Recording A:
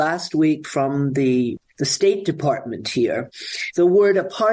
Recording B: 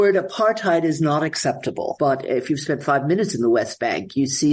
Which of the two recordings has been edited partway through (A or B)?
B